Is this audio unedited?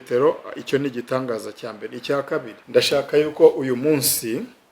no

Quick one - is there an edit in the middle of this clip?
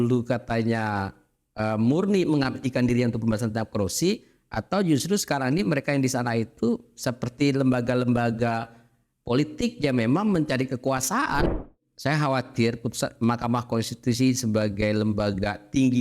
yes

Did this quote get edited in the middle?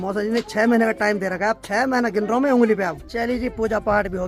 no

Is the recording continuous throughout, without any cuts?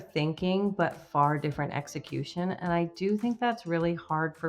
yes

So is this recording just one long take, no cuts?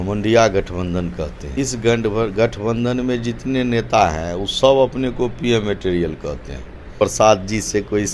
no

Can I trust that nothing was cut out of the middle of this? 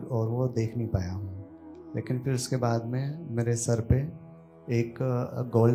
yes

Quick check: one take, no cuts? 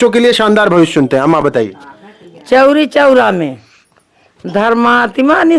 yes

